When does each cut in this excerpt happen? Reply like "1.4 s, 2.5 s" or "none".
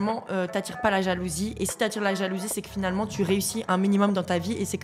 none